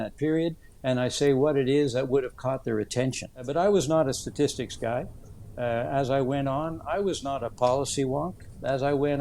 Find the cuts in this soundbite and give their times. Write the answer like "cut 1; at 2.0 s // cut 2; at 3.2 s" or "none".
cut 1; at 3.4 s

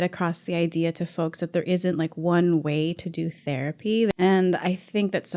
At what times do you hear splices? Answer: cut 1; at 4.1 s

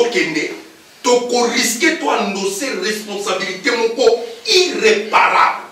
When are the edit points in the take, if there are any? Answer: none

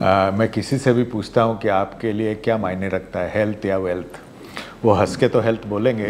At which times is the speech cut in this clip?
none

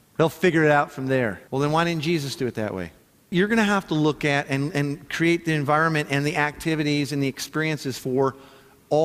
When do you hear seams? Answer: cut 1; at 1.4 s // cut 2; at 3.3 s

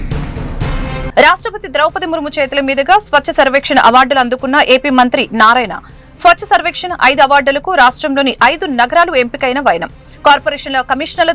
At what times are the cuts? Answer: cut 1; at 0.9 s

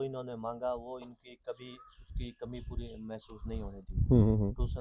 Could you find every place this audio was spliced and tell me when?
none

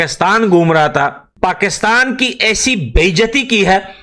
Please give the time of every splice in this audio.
cut 1; at 1.2 s

